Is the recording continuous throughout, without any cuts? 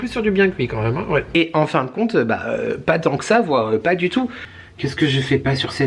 no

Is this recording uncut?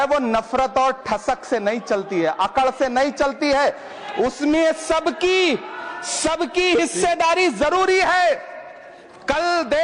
yes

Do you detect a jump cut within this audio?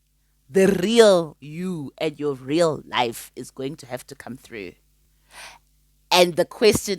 no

